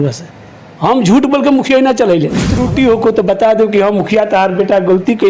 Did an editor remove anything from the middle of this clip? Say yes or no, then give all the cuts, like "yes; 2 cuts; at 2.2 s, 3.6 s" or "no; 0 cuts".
yes; 1 cut; at 2.6 s